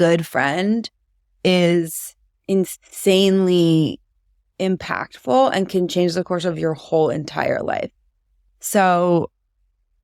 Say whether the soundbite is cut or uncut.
uncut